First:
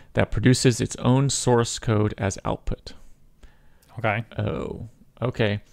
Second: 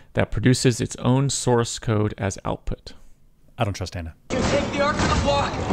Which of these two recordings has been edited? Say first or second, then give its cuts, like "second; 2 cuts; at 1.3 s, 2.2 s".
second; 2 cuts; at 3.4 s, 4.2 s